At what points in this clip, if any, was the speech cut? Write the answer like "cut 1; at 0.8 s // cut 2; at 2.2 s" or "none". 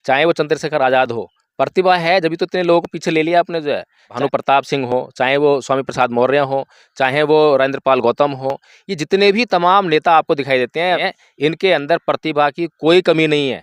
cut 1; at 4.1 s // cut 2; at 11.0 s